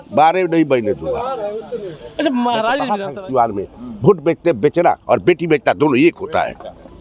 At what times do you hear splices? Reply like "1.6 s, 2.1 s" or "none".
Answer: 3.0 s